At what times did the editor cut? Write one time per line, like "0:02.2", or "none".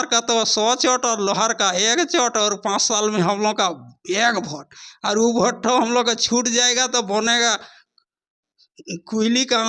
none